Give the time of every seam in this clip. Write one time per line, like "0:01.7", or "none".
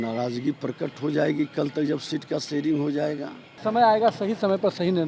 0:03.5